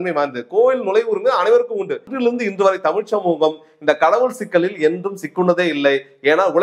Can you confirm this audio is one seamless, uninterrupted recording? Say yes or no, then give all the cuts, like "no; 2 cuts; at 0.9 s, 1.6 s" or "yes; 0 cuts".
no; 1 cut; at 2.1 s